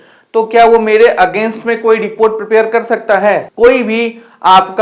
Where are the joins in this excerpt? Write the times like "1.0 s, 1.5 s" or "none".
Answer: 3.5 s